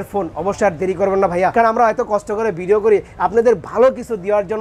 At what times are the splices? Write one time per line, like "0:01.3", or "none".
0:01.5